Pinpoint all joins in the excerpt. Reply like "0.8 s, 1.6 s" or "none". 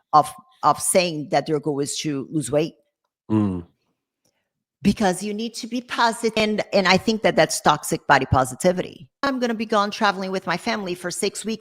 6.4 s, 9.3 s